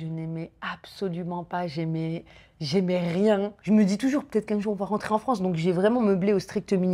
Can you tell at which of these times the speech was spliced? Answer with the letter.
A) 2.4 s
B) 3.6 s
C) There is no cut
B